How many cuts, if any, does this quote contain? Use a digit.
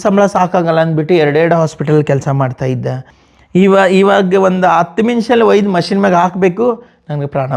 1